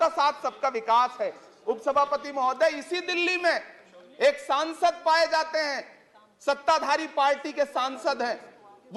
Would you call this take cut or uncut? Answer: uncut